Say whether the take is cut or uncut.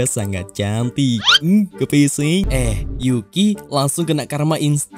cut